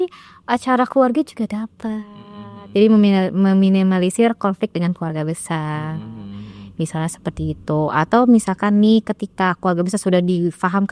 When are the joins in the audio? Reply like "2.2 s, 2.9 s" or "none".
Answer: none

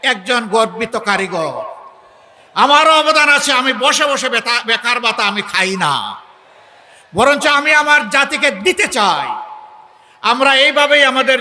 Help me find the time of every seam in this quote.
none

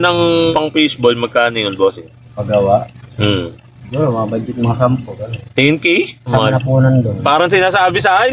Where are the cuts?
none

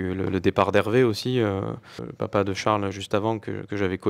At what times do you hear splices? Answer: 2.0 s

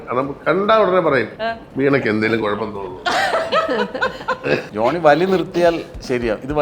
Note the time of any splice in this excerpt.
1.4 s, 4.7 s

